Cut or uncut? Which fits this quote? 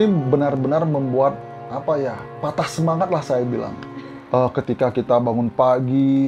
uncut